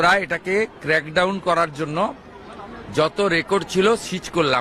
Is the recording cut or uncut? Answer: uncut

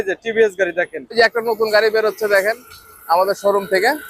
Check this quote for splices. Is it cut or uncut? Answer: cut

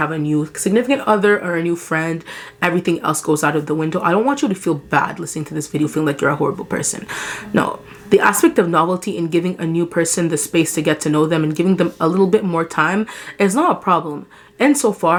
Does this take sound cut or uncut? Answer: uncut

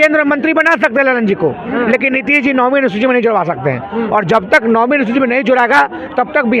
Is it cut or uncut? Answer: uncut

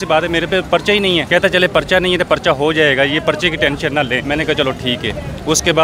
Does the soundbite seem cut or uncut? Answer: cut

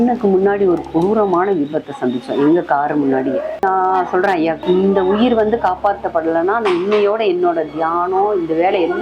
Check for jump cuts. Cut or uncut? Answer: cut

